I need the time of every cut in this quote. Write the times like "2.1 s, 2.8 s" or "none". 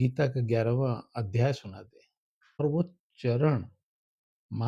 2.6 s